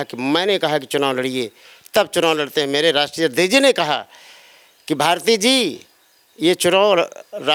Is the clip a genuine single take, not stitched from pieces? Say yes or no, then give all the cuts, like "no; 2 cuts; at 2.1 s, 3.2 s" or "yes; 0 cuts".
yes; 0 cuts